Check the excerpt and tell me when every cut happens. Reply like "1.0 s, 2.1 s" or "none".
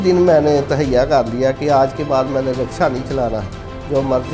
none